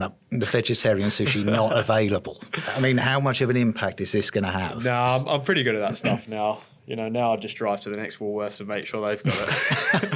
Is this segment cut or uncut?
uncut